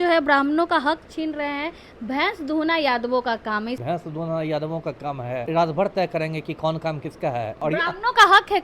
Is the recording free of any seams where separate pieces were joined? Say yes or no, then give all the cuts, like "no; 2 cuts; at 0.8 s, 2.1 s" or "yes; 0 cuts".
no; 3 cuts; at 3.8 s, 5.5 s, 7.6 s